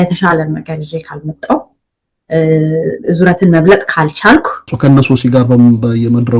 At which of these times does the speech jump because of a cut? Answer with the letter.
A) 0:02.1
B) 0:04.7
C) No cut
B